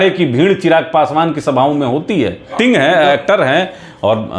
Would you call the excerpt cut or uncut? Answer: cut